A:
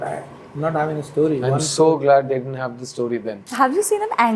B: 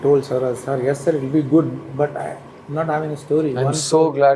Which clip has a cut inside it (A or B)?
A